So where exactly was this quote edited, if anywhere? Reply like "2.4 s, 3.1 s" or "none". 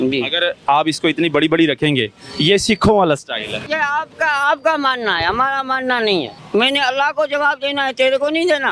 3.6 s, 6.4 s